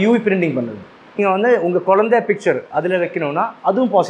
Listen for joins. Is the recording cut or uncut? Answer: cut